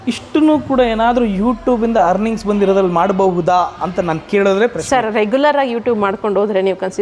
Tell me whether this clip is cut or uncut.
uncut